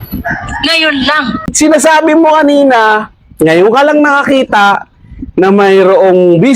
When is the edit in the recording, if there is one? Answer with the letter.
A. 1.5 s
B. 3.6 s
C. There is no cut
A